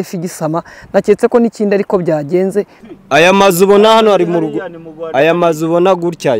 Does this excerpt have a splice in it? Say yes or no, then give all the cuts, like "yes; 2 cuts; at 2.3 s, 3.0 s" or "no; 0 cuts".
yes; 1 cut; at 2.8 s